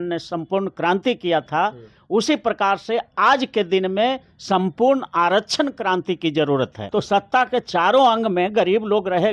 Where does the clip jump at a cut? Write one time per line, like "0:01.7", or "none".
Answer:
0:06.8